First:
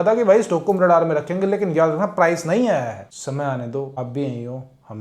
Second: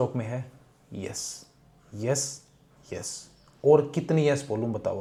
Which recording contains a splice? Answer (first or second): first